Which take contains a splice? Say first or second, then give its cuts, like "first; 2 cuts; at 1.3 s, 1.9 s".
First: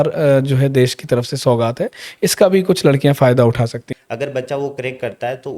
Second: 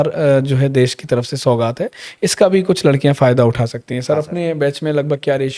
first; 1 cut; at 3.9 s